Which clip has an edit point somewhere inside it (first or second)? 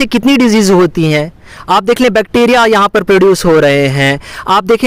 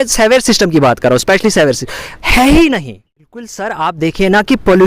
second